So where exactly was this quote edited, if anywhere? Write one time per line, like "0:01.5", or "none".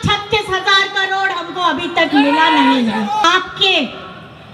0:03.2

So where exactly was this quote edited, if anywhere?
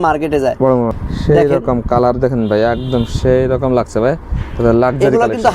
0:00.9

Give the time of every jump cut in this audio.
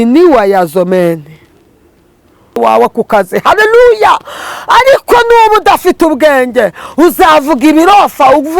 0:02.6

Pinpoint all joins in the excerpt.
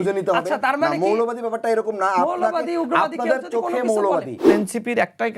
0:04.5

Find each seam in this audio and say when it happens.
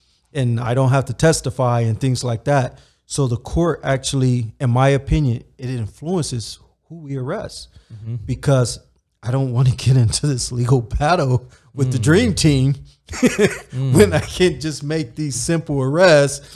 none

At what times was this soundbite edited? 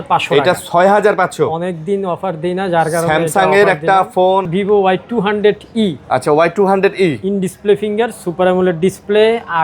0:04.5

